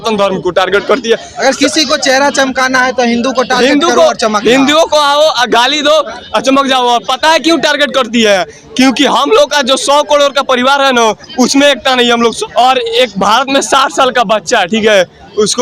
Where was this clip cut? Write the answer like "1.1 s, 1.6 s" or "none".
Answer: 12.4 s